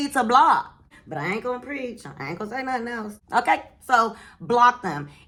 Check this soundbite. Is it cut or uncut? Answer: uncut